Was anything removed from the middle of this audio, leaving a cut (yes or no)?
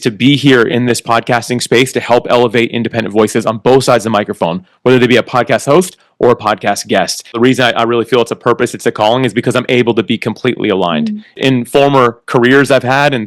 yes